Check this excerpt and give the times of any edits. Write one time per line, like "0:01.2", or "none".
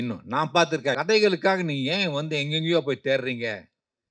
0:01.0